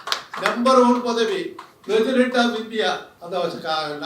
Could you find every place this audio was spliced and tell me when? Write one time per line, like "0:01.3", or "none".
0:03.1